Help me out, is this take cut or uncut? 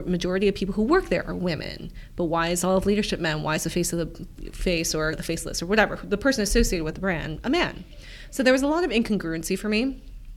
uncut